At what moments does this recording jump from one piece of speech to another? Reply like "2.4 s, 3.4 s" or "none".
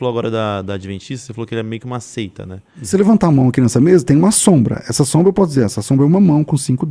2.9 s